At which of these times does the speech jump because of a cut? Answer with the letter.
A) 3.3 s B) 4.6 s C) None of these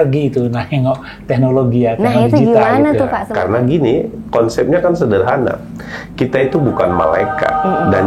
A